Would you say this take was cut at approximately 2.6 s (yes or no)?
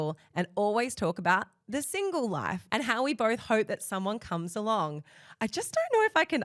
yes